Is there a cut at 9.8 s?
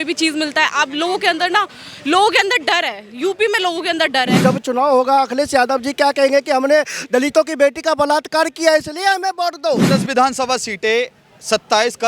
yes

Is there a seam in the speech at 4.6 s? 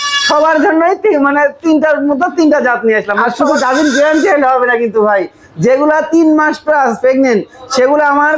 no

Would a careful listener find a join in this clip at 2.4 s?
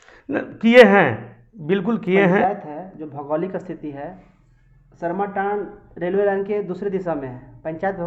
yes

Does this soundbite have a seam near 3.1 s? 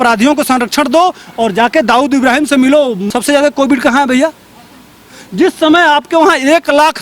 yes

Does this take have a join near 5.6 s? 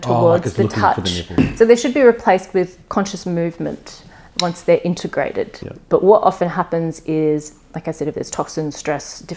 yes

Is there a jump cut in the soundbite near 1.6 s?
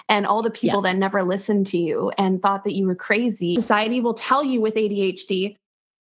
no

